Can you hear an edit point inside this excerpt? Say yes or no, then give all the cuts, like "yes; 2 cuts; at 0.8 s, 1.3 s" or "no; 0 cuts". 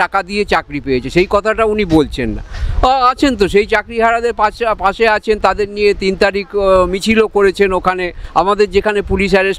no; 0 cuts